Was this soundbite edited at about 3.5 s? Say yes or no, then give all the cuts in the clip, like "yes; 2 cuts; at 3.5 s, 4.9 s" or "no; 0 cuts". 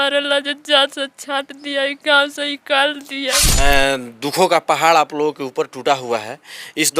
yes; 1 cut; at 3.5 s